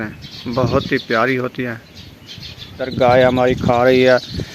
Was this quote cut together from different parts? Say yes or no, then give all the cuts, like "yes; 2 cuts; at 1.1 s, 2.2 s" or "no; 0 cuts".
yes; 1 cut; at 2.9 s